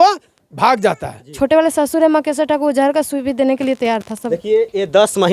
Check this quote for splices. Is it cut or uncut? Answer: cut